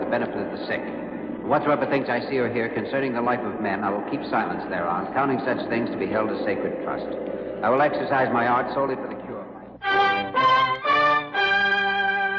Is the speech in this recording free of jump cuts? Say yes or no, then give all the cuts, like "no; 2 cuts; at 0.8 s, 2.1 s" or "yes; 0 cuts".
yes; 0 cuts